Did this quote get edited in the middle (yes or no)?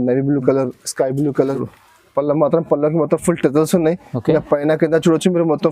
yes